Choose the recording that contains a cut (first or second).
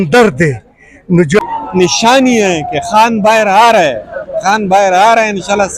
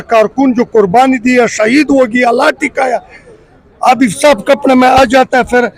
first